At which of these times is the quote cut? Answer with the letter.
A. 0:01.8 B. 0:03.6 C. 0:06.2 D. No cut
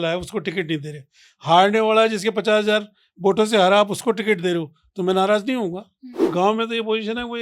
C